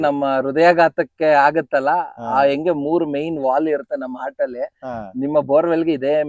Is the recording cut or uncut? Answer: uncut